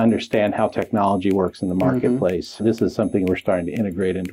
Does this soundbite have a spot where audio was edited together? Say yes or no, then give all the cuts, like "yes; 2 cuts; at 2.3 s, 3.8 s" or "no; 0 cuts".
yes; 1 cut; at 2.6 s